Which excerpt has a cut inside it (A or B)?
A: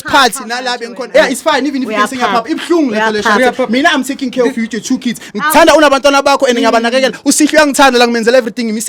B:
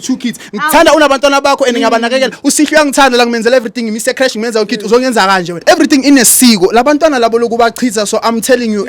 B